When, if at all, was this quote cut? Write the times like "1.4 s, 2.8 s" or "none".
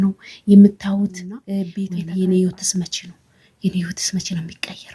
1.5 s